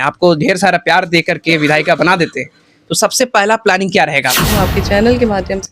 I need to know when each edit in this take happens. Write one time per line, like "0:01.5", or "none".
0:04.5